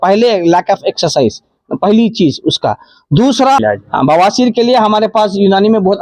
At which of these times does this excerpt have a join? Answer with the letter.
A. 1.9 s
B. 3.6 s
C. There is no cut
B